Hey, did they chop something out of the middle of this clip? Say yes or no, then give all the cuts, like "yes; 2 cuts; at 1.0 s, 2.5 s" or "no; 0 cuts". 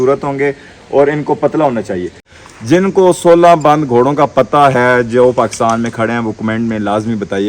yes; 1 cut; at 2.2 s